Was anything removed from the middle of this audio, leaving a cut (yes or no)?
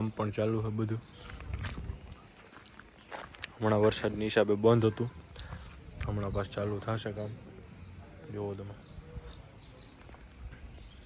no